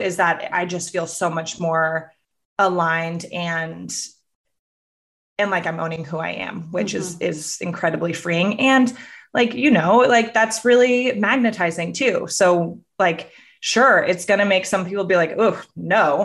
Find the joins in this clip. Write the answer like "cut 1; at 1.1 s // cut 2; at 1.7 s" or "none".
none

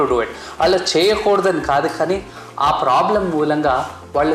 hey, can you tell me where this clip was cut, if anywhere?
none

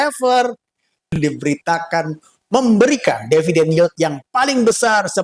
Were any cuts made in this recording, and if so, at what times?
cut 1; at 1.1 s

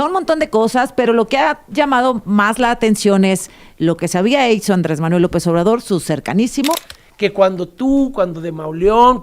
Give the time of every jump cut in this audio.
cut 1; at 6.8 s

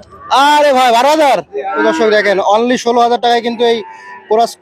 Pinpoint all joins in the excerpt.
cut 1; at 1.6 s

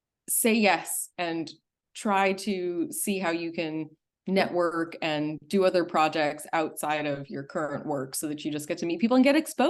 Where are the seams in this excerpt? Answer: none

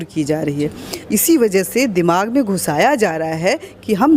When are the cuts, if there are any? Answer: cut 1; at 1.0 s

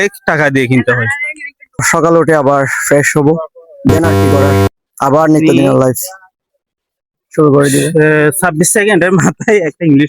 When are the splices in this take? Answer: cut 1; at 1.9 s

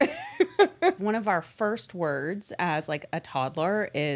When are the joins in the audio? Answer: cut 1; at 1.0 s

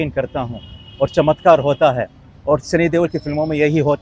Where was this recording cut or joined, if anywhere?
none

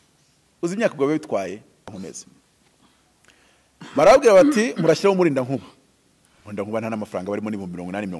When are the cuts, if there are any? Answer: cut 1; at 2.1 s

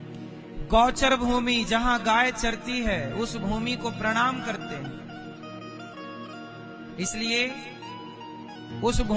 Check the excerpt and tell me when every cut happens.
none

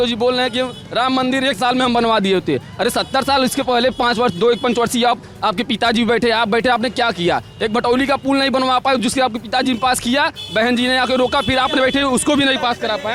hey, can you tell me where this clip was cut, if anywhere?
none

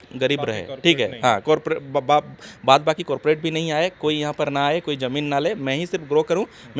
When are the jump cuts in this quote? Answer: none

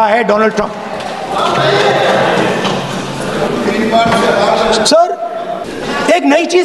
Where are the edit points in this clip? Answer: none

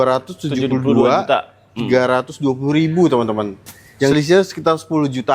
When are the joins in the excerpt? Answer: cut 1; at 4.1 s

